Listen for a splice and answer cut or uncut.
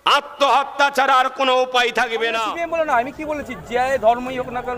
cut